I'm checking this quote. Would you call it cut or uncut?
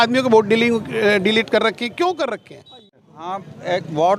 cut